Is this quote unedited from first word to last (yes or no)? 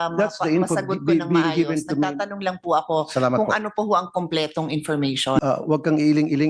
no